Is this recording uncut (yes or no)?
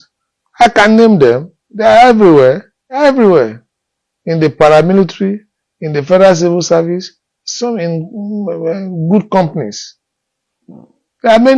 no